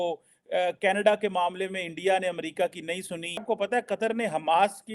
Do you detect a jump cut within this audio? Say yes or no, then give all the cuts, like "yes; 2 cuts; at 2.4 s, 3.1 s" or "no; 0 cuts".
yes; 1 cut; at 3.4 s